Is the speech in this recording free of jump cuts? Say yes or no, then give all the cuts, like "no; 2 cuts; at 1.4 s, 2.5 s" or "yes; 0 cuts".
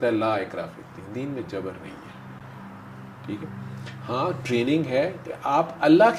yes; 0 cuts